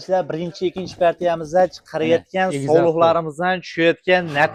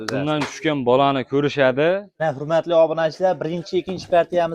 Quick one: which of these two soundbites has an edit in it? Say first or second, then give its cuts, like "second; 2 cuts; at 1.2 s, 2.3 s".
second; 1 cut; at 2.1 s